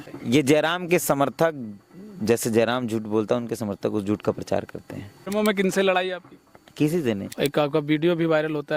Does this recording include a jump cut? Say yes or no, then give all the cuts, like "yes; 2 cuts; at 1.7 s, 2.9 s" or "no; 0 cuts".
yes; 2 cuts; at 5.3 s, 7.2 s